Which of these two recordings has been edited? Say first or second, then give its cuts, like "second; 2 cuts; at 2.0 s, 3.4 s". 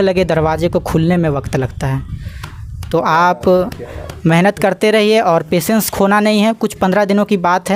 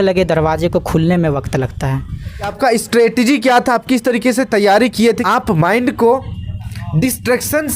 second; 2 cuts; at 2.5 s, 5.2 s